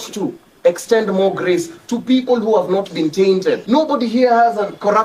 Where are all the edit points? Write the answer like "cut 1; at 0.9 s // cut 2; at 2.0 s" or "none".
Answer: cut 1; at 3.6 s